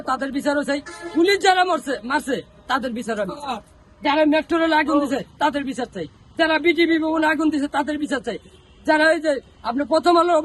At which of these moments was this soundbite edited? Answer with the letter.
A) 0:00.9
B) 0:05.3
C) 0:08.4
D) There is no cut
D